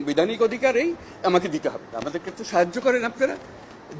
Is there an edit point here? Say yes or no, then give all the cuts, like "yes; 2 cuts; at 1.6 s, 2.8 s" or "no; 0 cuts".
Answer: yes; 1 cut; at 1.9 s